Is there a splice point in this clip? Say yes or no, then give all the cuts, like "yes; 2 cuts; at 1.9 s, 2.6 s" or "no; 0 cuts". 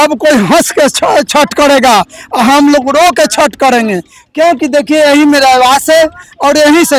no; 0 cuts